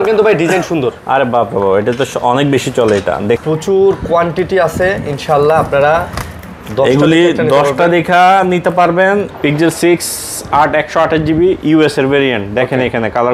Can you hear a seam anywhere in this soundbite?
yes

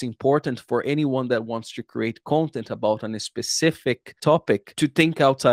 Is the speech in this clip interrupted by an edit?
no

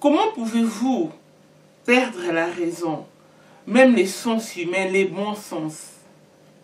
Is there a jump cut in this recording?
no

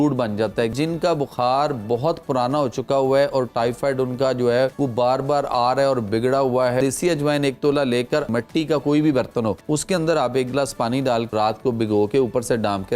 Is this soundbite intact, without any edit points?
no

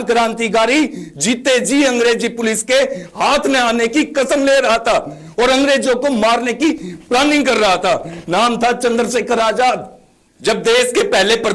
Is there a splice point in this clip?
no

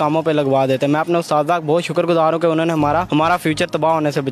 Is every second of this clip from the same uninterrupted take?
no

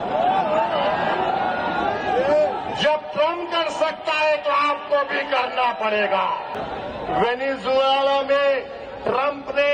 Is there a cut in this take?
yes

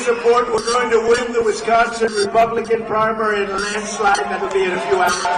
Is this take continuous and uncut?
yes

